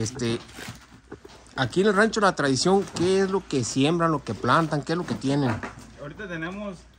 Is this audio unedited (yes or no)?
yes